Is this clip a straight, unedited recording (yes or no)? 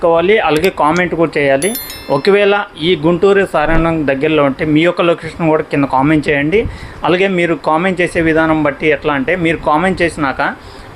yes